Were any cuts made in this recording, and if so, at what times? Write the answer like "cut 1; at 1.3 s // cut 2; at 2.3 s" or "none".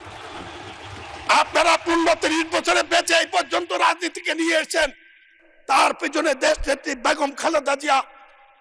none